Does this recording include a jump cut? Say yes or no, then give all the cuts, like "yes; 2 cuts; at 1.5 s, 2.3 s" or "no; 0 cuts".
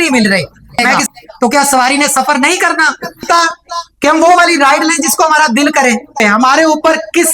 yes; 3 cuts; at 0.8 s, 3.3 s, 6.2 s